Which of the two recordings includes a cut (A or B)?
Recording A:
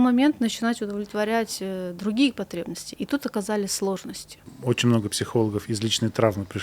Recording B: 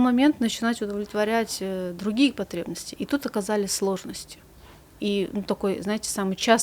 A